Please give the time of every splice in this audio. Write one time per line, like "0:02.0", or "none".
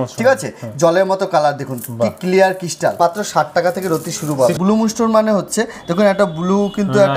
0:03.0
0:04.6